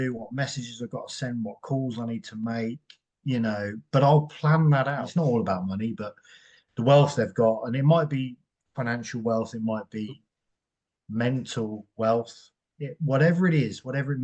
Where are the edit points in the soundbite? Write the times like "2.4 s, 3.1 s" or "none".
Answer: 5.0 s